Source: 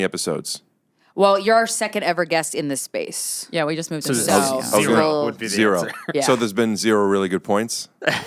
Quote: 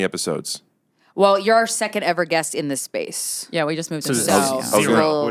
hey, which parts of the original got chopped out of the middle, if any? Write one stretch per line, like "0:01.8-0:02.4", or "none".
none